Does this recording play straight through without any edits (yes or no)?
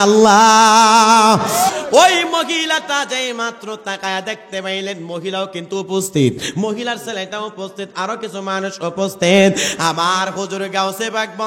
no